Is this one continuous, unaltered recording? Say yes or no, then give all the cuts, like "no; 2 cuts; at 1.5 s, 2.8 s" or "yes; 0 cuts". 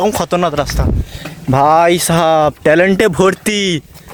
yes; 0 cuts